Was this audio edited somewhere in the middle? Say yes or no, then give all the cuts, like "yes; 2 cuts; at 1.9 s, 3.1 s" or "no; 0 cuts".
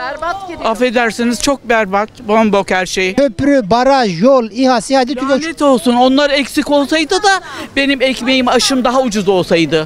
yes; 1 cut; at 3.1 s